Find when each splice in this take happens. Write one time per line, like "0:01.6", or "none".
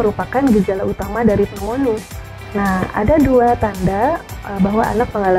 none